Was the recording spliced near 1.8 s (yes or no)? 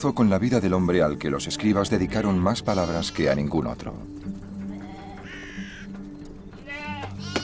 yes